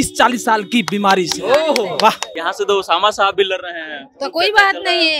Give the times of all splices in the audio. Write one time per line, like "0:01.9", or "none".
0:02.3